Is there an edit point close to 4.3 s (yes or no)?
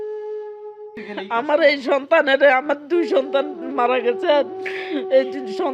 no